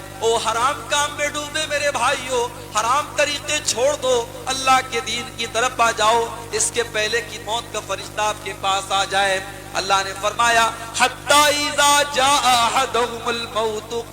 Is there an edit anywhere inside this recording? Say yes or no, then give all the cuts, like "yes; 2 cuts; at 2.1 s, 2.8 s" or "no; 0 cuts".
no; 0 cuts